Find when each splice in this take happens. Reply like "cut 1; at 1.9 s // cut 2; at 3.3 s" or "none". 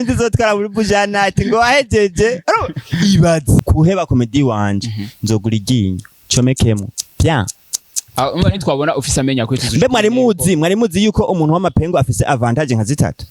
cut 1; at 3.6 s